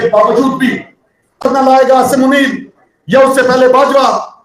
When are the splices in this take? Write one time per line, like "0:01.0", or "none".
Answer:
0:01.4